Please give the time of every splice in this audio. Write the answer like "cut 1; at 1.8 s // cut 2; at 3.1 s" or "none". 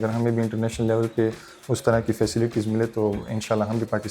none